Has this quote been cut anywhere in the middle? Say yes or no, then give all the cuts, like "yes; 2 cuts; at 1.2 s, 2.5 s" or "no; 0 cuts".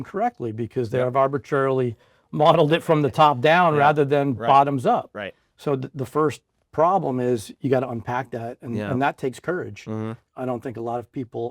yes; 1 cut; at 10.2 s